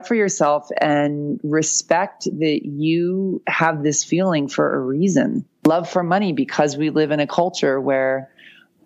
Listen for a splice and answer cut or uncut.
cut